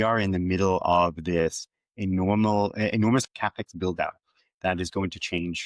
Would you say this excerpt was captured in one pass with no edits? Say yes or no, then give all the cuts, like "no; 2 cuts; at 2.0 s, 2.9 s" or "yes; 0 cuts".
no; 1 cut; at 3.3 s